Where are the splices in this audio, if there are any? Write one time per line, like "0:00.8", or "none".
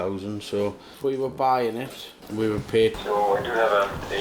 0:02.2
0:03.0

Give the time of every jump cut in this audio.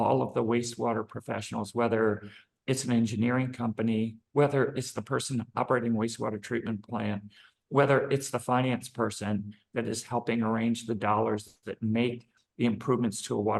none

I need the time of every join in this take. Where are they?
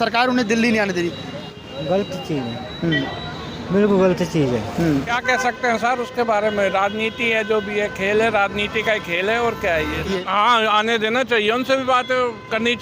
0:01.4
0:05.2
0:10.1

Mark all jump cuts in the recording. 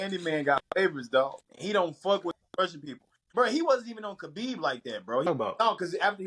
0:01.5
0:05.3

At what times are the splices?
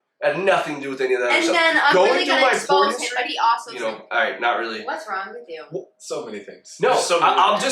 0:03.7

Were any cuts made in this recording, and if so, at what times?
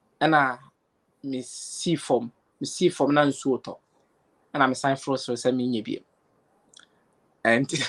none

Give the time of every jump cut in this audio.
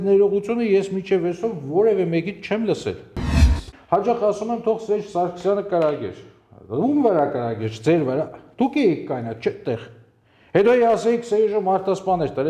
0:03.4

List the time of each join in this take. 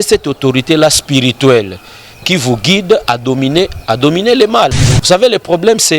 0:04.9

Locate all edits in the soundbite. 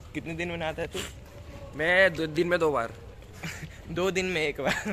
none

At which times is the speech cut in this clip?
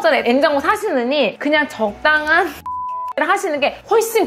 0:01.3

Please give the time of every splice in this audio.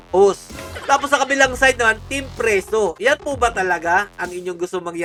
none

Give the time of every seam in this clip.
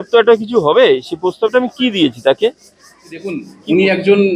0:03.4

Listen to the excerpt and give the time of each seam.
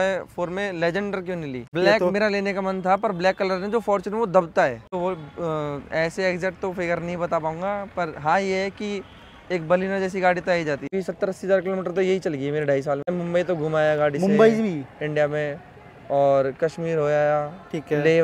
0:01.7
0:04.9
0:10.9
0:13.1

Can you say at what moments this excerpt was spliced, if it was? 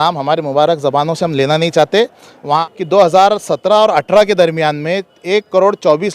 0:02.6

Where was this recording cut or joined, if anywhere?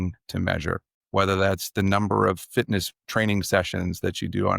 0:03.0

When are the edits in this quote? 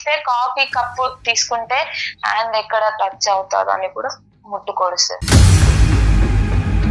0:05.1

